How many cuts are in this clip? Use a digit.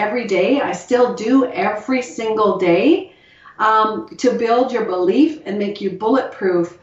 0